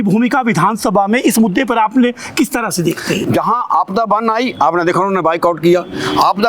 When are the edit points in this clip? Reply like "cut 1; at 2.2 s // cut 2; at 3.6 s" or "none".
none